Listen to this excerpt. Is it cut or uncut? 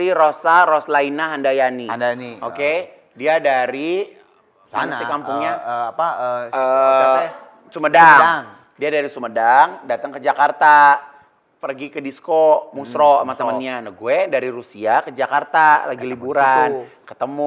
uncut